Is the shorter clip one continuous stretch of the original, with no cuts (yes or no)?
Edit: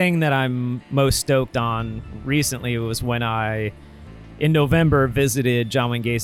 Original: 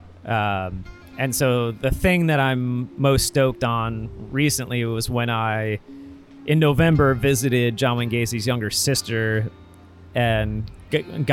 yes